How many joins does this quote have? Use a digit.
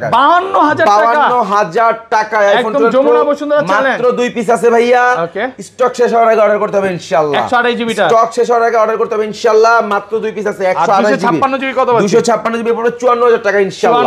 0